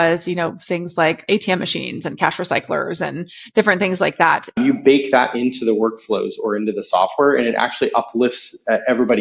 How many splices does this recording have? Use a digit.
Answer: 2